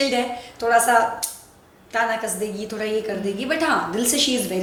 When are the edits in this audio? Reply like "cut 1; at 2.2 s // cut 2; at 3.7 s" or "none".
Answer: none